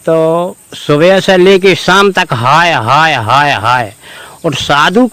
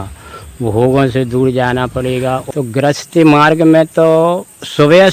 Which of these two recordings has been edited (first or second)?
second